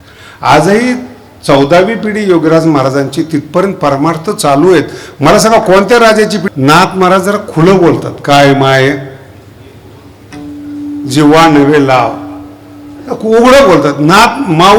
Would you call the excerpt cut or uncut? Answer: cut